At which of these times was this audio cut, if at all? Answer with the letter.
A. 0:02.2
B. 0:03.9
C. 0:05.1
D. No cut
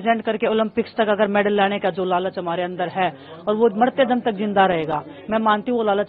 D